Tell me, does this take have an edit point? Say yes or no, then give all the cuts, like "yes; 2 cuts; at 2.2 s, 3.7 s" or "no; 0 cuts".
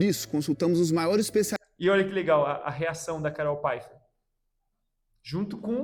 no; 0 cuts